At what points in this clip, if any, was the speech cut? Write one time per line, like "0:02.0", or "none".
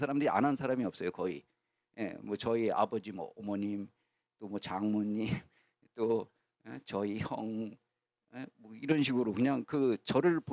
none